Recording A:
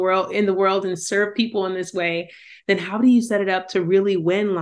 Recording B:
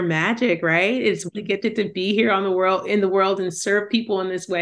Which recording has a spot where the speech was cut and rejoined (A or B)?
B